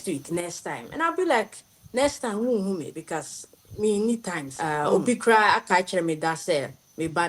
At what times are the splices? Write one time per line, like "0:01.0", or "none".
0:04.5